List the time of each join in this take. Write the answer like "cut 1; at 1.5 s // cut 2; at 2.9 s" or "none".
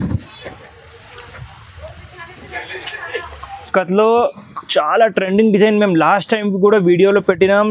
cut 1; at 3.7 s